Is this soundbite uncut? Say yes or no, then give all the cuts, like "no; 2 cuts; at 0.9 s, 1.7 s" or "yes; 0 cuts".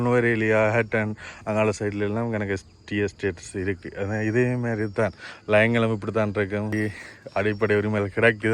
no; 1 cut; at 6.7 s